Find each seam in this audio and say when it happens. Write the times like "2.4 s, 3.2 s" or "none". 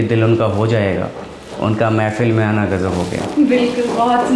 none